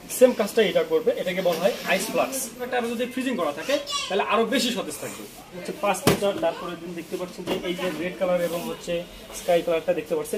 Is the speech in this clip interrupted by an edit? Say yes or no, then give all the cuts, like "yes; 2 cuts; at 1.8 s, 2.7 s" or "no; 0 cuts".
yes; 2 cuts; at 2.7 s, 5.7 s